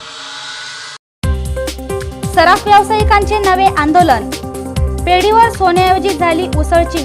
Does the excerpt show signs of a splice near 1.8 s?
no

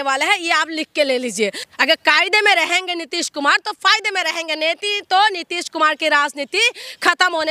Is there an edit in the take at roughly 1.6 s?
yes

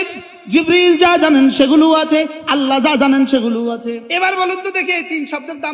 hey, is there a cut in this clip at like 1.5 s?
no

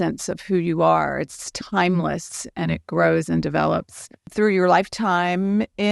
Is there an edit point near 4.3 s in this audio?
yes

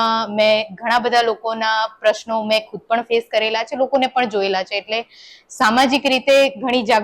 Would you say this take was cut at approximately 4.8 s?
no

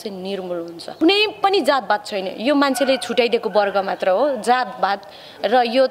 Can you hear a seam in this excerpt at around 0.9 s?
yes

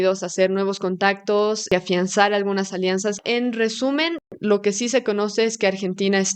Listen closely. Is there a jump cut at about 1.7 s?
yes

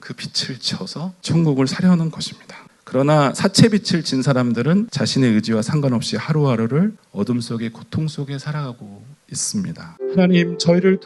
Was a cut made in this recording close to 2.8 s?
no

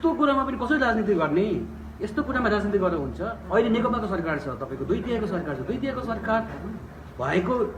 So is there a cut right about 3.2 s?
no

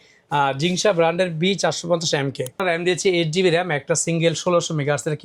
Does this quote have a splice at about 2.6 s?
yes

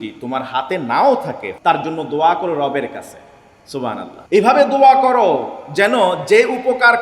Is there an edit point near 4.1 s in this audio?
yes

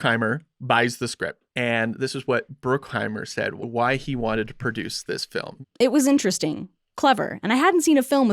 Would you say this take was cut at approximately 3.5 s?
yes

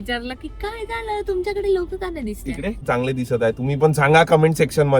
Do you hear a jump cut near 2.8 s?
yes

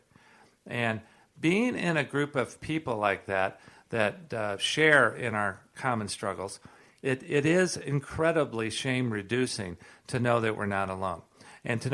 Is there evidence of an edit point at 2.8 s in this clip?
no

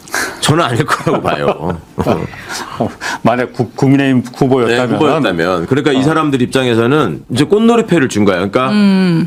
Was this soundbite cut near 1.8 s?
no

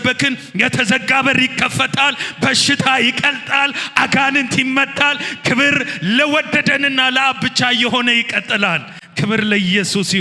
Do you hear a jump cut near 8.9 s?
no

